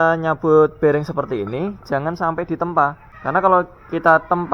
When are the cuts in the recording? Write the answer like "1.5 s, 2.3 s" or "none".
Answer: 3.1 s

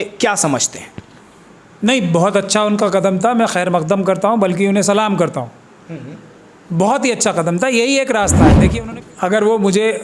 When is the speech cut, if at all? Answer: 8.6 s

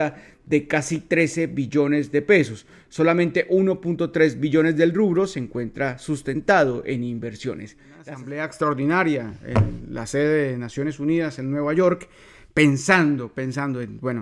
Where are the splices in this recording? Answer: 8.0 s

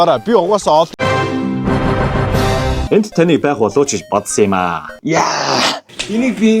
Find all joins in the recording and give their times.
0.9 s, 2.6 s

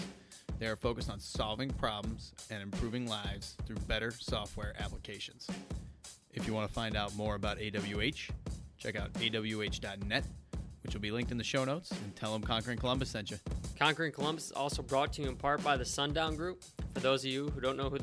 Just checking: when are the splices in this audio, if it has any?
13.6 s

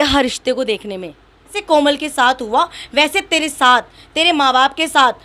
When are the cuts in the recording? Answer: 1.6 s

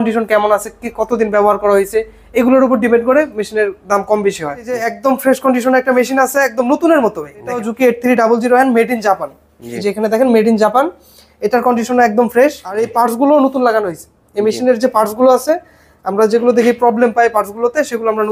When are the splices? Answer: 4.9 s, 7.7 s, 12.9 s

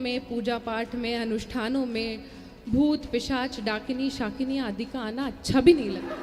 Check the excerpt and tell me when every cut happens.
none

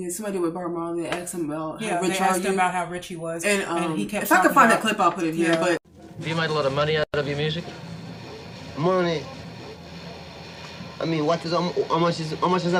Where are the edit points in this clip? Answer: none

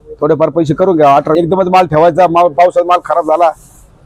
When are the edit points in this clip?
1.3 s

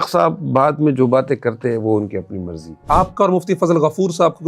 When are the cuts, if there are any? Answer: 2.8 s

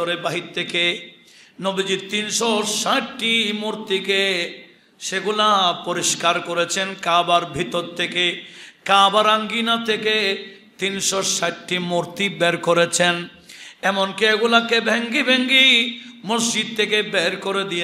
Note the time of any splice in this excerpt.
none

